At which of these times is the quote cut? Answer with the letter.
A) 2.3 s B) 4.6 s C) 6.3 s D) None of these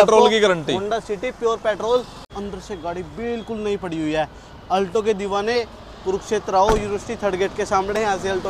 A